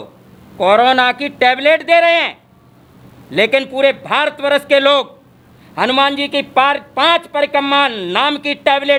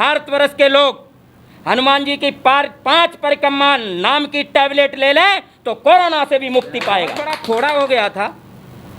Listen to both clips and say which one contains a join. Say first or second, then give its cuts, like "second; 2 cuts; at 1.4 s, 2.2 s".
second; 1 cut; at 7.3 s